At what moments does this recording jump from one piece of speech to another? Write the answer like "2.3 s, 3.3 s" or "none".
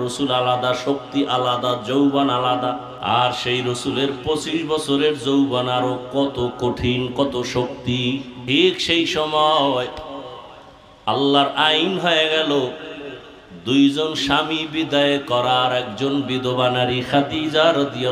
2.9 s, 8.3 s